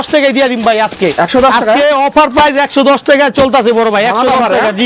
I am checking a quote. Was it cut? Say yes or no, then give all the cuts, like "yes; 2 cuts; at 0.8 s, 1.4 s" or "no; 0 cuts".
no; 0 cuts